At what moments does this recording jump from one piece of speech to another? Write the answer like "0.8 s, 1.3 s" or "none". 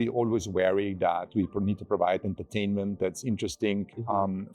none